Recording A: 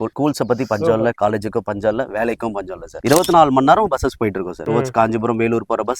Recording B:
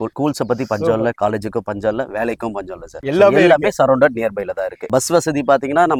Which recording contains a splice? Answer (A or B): A